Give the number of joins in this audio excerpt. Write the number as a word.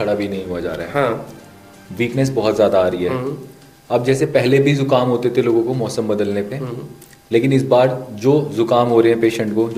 zero